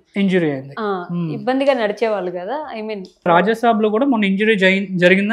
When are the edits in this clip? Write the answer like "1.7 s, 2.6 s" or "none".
3.3 s

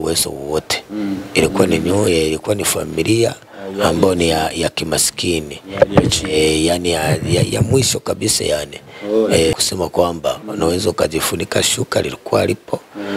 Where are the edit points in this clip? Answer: 9.5 s

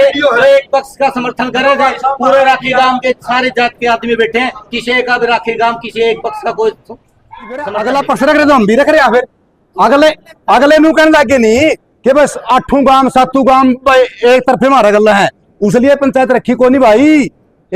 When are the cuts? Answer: 7.8 s

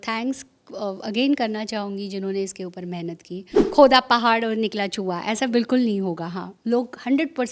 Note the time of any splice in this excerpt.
3.6 s

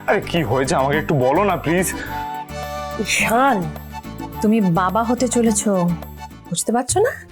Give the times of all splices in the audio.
none

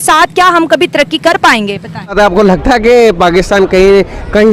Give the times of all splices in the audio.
2.1 s

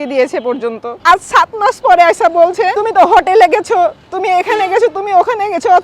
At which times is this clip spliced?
0.9 s, 2.8 s

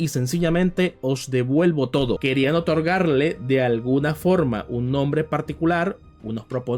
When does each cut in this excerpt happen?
2.2 s

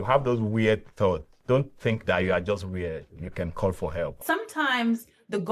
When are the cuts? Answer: 4.2 s

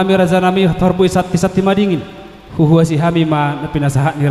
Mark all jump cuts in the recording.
none

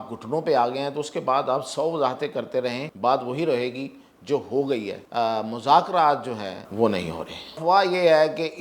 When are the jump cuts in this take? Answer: 2.9 s, 5.0 s, 6.6 s, 7.6 s

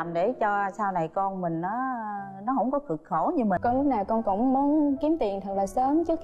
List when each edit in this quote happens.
3.6 s

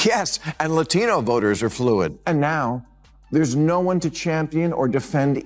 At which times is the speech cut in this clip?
2.2 s

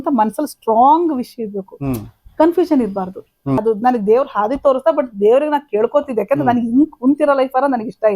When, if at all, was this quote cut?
3.6 s

